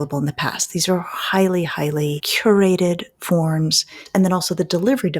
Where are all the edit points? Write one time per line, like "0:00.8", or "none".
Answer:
0:02.3
0:04.0